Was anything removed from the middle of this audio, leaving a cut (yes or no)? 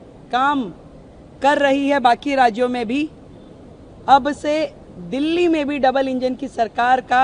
no